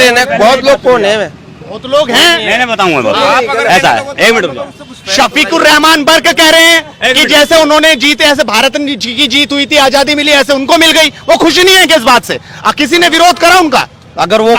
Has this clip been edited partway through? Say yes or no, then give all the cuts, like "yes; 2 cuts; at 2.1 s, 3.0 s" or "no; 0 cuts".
no; 0 cuts